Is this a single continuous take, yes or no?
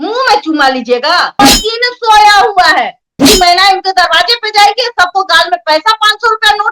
no